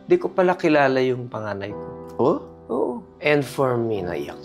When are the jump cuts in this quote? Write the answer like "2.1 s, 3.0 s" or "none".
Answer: none